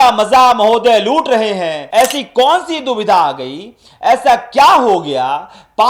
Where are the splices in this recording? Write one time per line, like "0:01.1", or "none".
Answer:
0:01.8